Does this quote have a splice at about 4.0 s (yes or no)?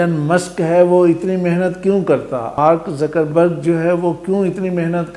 no